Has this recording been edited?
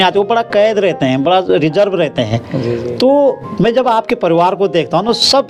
no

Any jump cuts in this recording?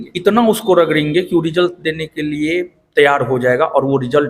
no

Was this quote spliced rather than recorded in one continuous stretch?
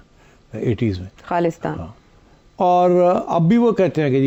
no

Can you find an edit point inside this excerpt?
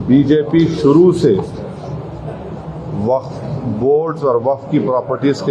no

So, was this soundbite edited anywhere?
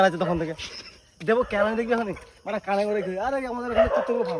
no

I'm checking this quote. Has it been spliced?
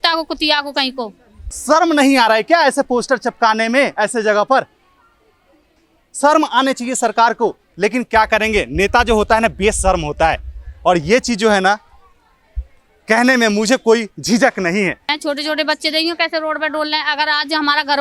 yes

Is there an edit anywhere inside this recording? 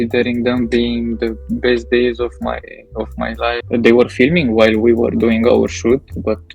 yes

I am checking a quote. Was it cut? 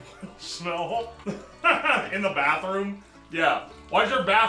no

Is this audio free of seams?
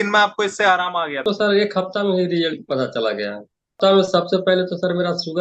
no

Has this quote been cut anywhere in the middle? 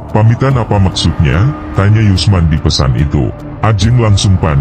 yes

